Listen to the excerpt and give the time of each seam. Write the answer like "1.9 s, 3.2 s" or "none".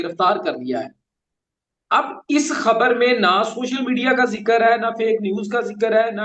none